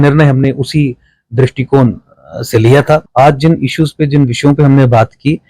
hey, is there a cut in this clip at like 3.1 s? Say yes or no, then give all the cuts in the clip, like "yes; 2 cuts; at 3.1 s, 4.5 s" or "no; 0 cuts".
yes; 1 cut; at 3.1 s